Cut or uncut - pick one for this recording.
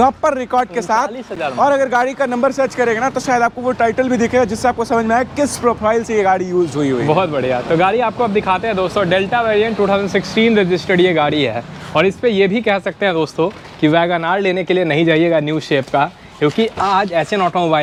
uncut